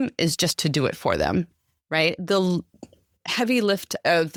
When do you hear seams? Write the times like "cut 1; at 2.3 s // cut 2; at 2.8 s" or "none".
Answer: none